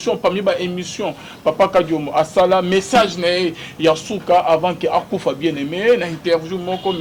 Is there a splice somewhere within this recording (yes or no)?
no